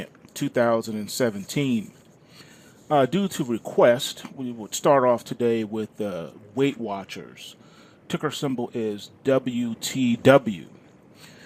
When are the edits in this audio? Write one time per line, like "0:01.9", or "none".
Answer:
0:07.9

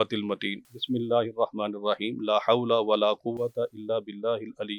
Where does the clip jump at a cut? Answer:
none

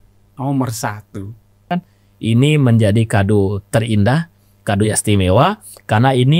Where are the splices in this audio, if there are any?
0:01.7

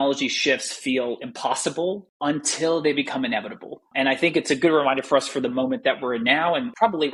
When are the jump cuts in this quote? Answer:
none

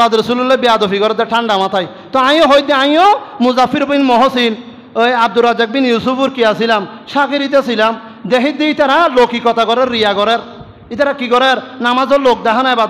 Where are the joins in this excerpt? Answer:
none

